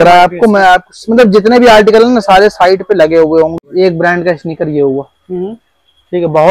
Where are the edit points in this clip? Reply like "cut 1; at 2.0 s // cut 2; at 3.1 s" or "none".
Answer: cut 1; at 3.5 s